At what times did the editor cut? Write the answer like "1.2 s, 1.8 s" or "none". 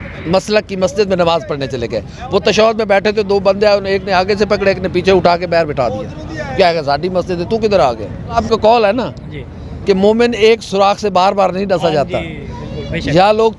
8.4 s